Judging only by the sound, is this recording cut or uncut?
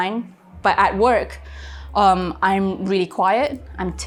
uncut